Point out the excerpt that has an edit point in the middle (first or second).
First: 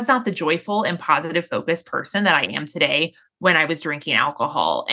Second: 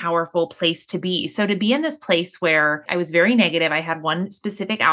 second